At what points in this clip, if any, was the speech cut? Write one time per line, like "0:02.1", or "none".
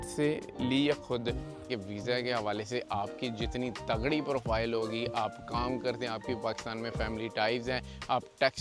0:01.7